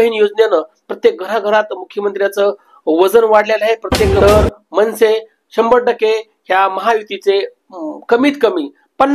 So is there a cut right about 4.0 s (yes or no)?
yes